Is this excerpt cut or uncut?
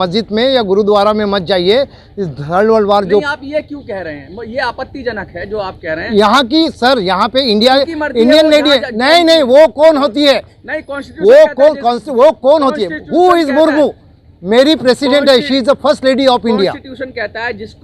uncut